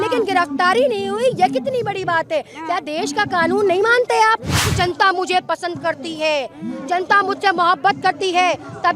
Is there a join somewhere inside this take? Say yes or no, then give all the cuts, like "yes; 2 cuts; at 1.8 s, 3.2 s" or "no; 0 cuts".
yes; 1 cut; at 4.6 s